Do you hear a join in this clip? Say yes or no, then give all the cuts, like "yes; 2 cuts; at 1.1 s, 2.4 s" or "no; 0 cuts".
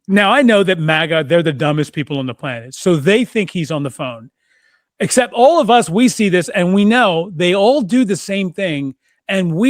no; 0 cuts